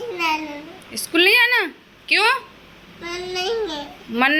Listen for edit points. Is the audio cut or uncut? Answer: uncut